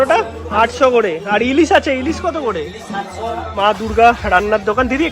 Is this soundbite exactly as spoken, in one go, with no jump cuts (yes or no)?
no